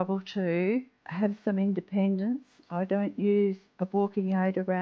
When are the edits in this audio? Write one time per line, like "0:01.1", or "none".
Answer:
0:01.0
0:03.7